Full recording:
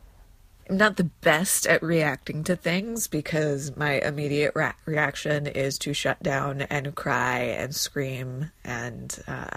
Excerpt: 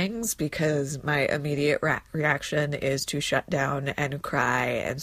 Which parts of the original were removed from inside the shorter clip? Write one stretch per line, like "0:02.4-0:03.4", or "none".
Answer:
none